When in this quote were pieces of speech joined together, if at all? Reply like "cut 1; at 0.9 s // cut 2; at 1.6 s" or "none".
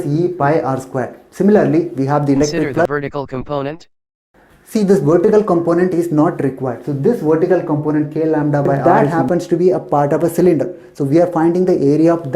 cut 1; at 2.9 s // cut 2; at 8.8 s